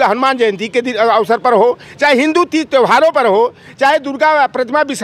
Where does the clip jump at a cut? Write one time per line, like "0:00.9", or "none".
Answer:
none